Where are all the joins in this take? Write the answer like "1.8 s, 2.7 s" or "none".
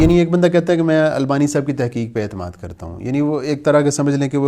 none